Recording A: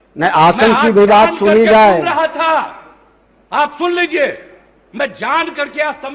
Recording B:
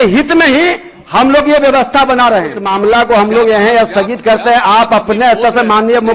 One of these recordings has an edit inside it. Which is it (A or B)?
B